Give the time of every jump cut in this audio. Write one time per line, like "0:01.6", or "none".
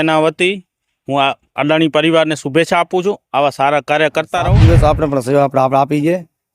0:04.5